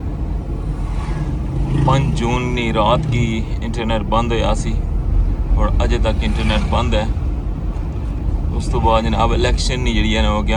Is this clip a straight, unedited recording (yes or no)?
yes